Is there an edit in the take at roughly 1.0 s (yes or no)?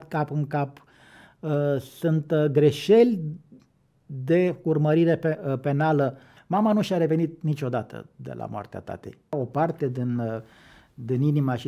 no